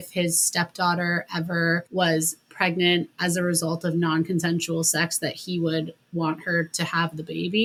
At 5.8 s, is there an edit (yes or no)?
no